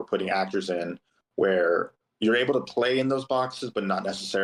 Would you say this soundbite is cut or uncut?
uncut